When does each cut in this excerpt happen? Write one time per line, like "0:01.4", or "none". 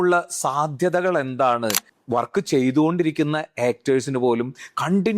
0:01.9